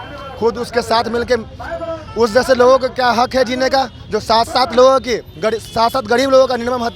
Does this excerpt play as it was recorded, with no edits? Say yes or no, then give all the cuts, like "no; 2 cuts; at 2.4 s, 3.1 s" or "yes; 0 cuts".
yes; 0 cuts